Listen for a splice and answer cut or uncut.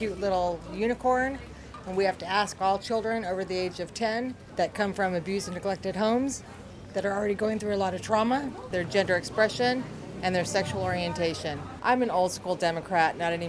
cut